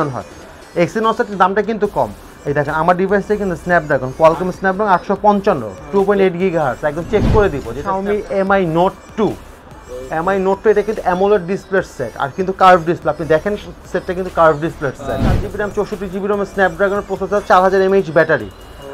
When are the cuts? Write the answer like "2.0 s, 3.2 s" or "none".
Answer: 7.8 s, 15.5 s